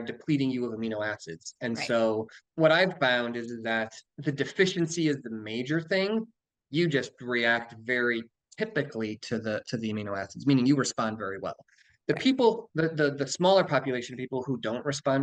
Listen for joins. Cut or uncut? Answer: cut